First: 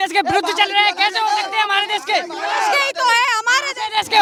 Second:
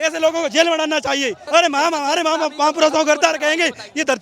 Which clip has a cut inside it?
second; 1 cut; at 1.4 s

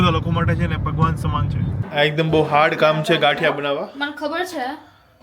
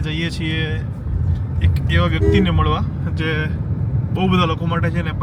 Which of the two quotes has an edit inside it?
first; 1 cut; at 1.8 s

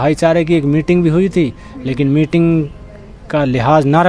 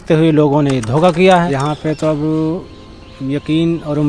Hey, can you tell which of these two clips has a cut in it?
second; 1 cut; at 1.5 s

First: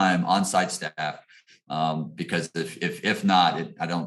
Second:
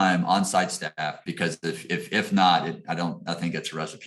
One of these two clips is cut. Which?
second; 1 cut; at 1.2 s

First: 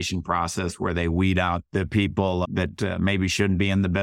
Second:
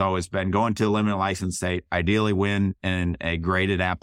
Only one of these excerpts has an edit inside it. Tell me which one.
first; 1 cut; at 1.6 s

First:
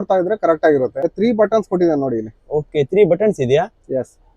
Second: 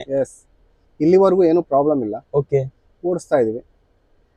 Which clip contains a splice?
first; 1 cut; at 1.1 s

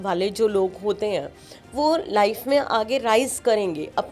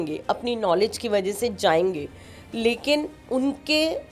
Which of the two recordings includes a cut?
second; 1 cut; at 3.2 s

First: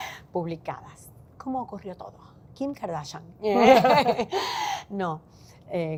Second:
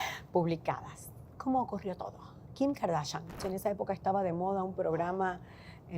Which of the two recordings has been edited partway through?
second; 1 cut; at 3.3 s

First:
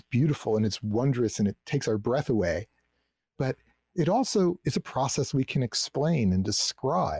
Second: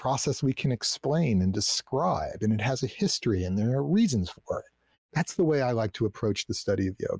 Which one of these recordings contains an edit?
second; 1 cut; at 4.9 s

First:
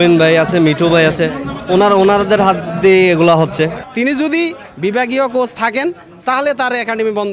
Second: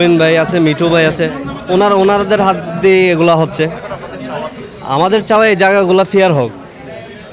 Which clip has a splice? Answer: first; 1 cut; at 3.8 s

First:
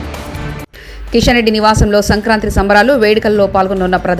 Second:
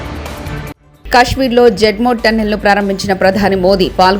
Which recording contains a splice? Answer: second; 1 cut; at 0.9 s

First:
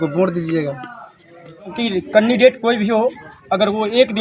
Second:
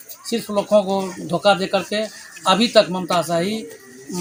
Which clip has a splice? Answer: first; 1 cut; at 1.7 s

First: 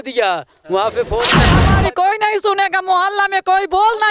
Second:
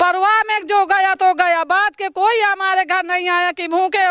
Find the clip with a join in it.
first; 1 cut; at 1.5 s

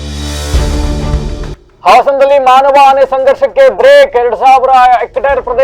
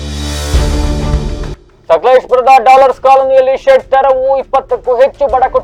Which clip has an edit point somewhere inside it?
first; 1 cut; at 1.6 s

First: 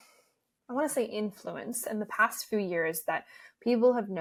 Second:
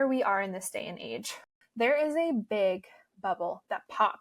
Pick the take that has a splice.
second; 1 cut; at 1.4 s

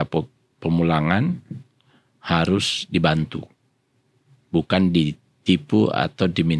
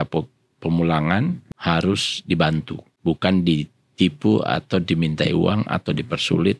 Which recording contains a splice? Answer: second; 2 cuts; at 1.5 s, 2.8 s

